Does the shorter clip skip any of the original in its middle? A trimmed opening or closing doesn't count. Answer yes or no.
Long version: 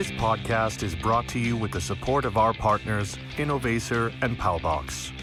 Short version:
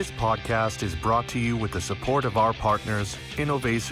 no